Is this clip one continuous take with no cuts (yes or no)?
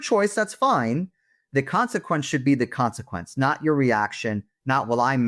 yes